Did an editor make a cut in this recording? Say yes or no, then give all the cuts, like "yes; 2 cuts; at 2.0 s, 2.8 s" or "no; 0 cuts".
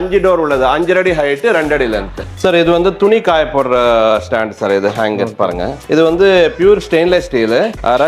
yes; 2 cuts; at 2.2 s, 5.8 s